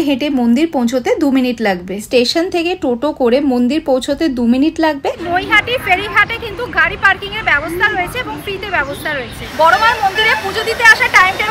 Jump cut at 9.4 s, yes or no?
yes